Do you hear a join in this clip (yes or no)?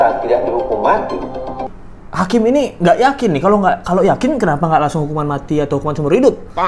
yes